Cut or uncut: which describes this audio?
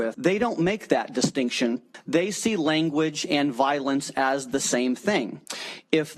cut